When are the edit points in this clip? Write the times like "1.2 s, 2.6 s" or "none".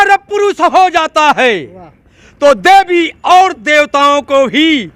none